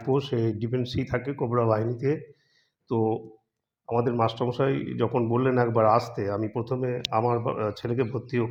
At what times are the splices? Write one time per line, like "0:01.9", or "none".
none